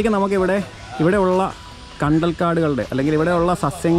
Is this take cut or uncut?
uncut